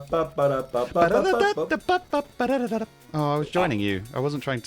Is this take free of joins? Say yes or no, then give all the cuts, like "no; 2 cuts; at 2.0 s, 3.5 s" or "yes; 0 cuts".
yes; 0 cuts